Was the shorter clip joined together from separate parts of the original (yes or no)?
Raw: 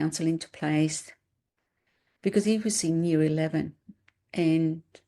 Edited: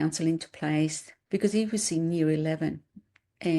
yes